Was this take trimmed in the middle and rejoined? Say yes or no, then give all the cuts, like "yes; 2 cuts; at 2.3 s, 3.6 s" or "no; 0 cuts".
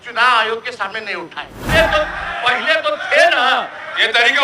yes; 1 cut; at 1.7 s